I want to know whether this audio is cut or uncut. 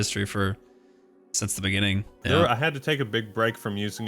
cut